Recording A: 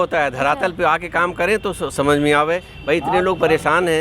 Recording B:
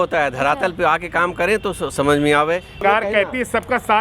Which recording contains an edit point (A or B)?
B